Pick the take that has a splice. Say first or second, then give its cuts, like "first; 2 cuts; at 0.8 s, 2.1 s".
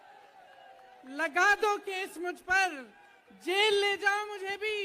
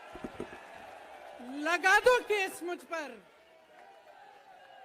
second; 1 cut; at 1.3 s